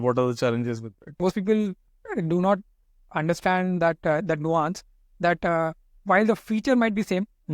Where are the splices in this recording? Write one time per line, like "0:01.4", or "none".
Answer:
0:01.2